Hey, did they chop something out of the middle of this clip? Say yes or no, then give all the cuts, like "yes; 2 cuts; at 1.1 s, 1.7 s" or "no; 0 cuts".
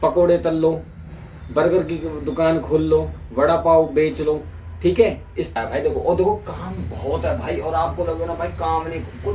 yes; 1 cut; at 5.5 s